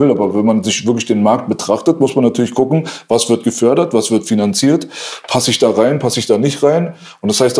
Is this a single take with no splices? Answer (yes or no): yes